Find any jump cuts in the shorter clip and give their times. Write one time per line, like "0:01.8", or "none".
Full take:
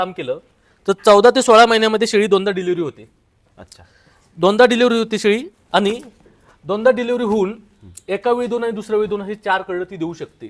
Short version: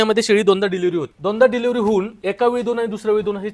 0:01.1
0:02.2